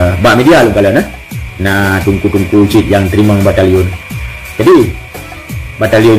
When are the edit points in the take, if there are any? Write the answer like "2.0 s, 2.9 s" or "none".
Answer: none